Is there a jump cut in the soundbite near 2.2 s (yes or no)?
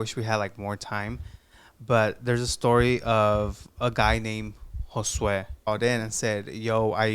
no